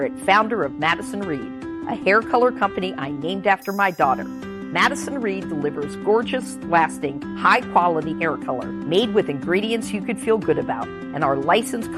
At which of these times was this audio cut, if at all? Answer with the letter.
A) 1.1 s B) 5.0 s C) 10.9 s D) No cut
D